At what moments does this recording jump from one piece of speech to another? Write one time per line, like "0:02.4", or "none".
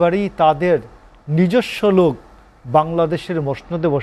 none